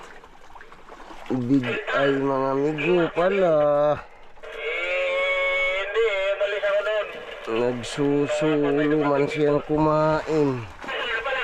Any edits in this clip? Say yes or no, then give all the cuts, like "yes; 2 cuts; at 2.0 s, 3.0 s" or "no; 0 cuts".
no; 0 cuts